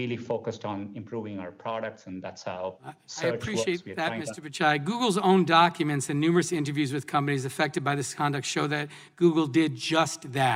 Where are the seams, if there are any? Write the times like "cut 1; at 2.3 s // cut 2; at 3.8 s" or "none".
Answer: none

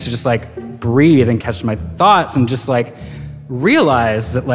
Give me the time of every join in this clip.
cut 1; at 1.5 s

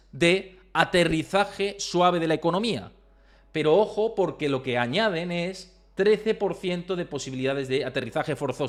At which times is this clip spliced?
none

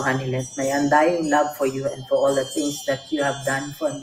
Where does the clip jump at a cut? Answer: none

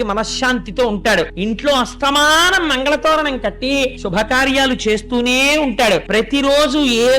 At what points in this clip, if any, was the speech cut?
cut 1; at 1.3 s // cut 2; at 4.0 s // cut 3; at 6.1 s

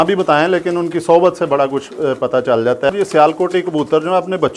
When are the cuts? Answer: cut 1; at 2.9 s

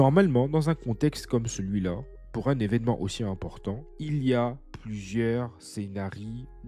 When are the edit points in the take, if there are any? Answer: none

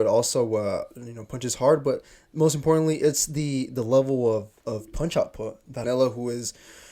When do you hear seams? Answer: cut 1; at 5.8 s

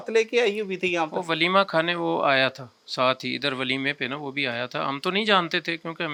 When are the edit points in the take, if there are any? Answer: none

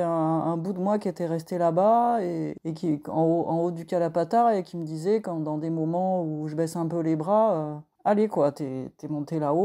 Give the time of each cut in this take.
cut 1; at 2.6 s // cut 2; at 7.8 s

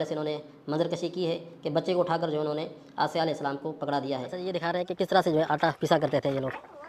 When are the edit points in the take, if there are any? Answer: cut 1; at 4.3 s

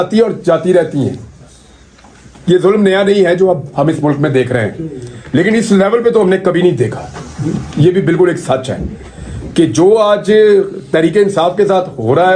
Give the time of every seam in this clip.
none

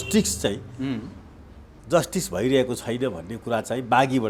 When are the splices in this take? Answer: none

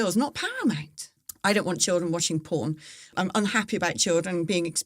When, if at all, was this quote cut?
cut 1; at 1.2 s // cut 2; at 3.1 s

